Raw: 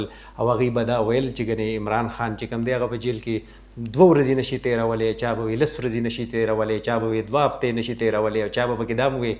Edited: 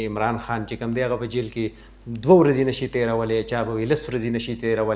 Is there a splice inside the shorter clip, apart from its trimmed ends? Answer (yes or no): no